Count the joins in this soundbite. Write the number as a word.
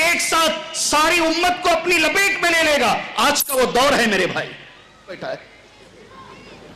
one